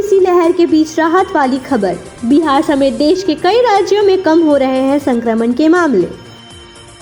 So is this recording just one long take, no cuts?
yes; 0 cuts

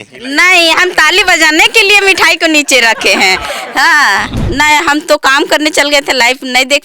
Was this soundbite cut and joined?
yes; 1 cut; at 4.4 s

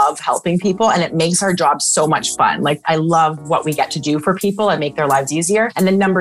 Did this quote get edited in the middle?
yes; 1 cut; at 2.8 s

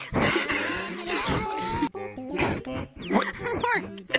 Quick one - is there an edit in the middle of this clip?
yes; 1 cut; at 1.9 s

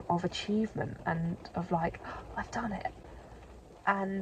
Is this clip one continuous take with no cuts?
yes; 0 cuts

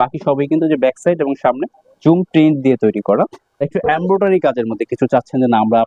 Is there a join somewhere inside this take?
yes; 1 cut; at 3.7 s

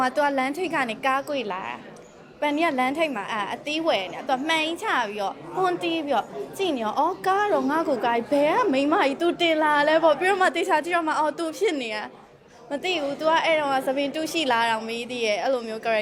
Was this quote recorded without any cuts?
yes; 0 cuts

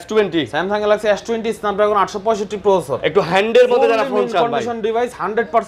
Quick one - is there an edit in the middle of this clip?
no; 0 cuts

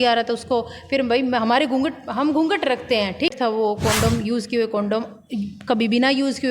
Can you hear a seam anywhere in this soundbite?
yes; 1 cut; at 3.3 s

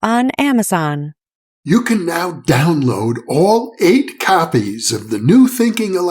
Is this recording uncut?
no; 1 cut; at 1.4 s

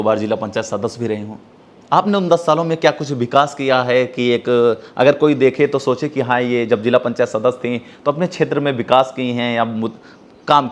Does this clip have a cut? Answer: no; 0 cuts

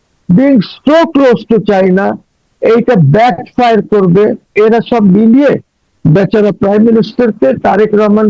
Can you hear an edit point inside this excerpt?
yes; 1 cut; at 4.5 s

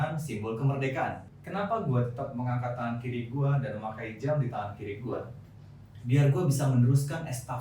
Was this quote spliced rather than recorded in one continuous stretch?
yes; 1 cut; at 1.3 s

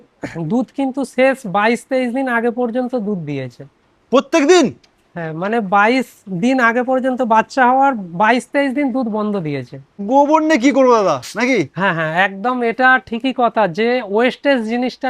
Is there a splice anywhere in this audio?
yes; 1 cut; at 10.0 s

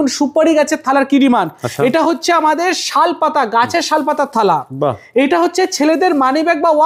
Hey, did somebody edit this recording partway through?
no; 0 cuts

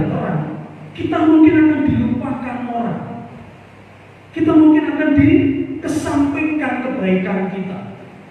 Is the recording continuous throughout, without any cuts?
yes; 0 cuts

